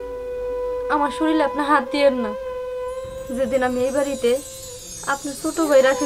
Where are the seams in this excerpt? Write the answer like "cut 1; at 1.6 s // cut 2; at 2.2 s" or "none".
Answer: cut 1; at 2.2 s // cut 2; at 3.3 s